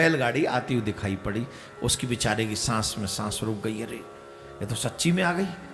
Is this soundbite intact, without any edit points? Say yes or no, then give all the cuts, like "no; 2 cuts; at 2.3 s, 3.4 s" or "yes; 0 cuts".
yes; 0 cuts